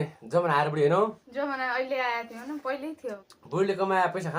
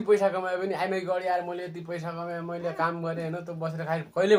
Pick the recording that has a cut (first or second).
first